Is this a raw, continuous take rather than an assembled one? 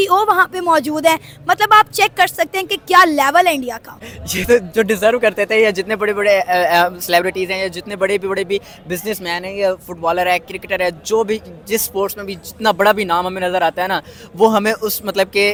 yes; 0 cuts

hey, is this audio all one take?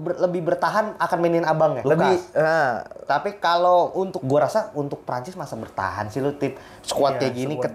no; 2 cuts; at 1.8 s, 4.2 s

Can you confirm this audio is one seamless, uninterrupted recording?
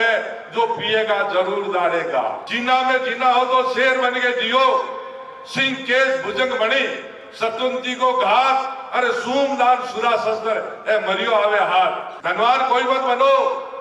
no; 2 cuts; at 2.5 s, 12.1 s

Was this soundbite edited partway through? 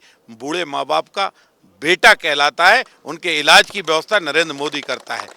no; 0 cuts

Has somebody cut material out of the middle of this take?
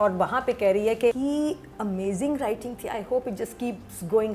yes; 1 cut; at 1.2 s

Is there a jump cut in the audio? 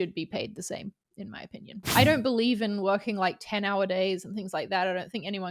yes; 1 cut; at 1.9 s

